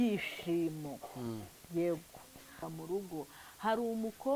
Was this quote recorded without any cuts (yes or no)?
no